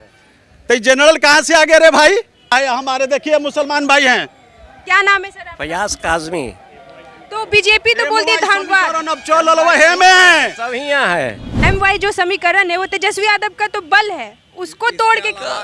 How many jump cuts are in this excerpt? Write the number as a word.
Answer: two